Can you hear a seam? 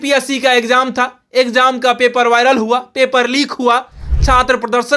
no; 0 cuts

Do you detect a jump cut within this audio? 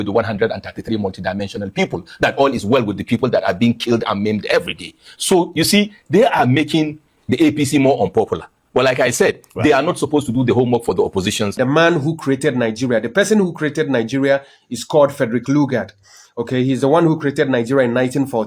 yes; 1 cut; at 11.5 s

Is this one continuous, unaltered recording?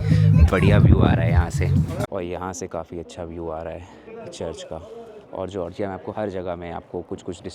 no; 3 cuts; at 2.0 s, 4.1 s, 5.2 s

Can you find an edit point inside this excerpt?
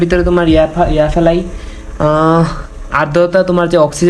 no; 0 cuts

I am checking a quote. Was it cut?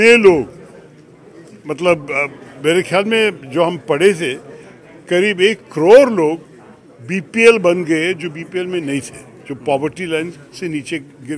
no; 0 cuts

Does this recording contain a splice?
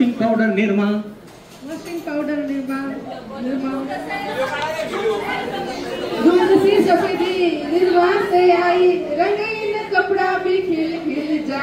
no; 0 cuts

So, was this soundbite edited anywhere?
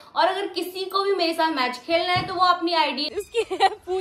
yes; 1 cut; at 3.1 s

